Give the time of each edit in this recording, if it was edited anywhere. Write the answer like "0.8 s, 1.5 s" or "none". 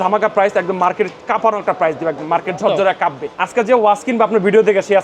3.3 s